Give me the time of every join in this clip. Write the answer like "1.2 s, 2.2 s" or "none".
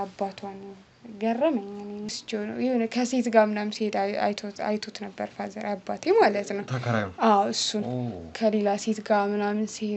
2.1 s

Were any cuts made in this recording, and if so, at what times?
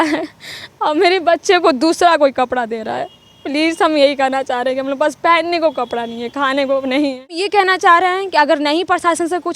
7.5 s

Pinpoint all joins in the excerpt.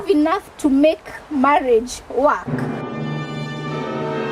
none

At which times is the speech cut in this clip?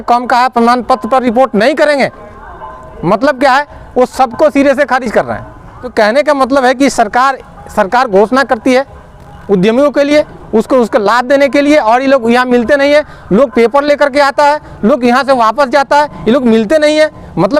5.9 s

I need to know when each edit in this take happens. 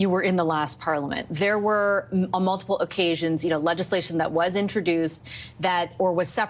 none

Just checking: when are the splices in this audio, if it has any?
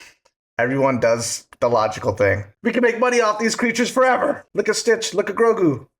2.5 s, 4.4 s

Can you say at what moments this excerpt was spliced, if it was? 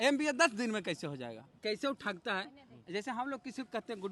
1.6 s

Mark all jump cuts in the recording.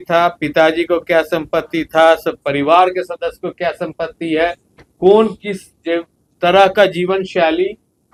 none

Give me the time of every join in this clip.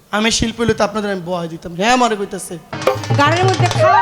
2.8 s

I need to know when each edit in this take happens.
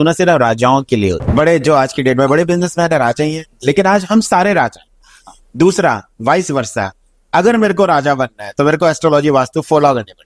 1.2 s

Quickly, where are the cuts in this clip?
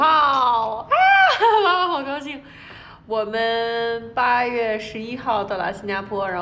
none

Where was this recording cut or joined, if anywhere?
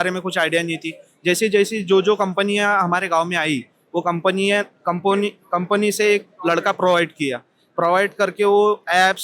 none

